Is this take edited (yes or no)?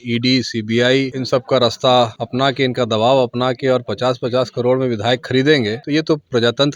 yes